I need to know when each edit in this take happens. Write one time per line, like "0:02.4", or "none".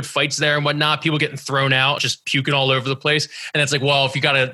0:02.0